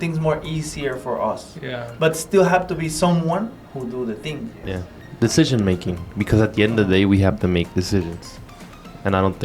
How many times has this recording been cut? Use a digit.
1